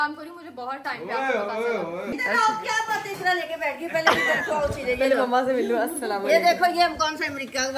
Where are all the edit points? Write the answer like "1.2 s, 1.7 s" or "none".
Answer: none